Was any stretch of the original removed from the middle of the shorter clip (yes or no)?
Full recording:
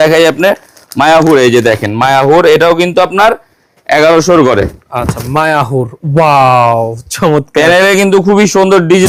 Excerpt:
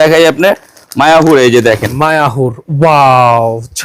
yes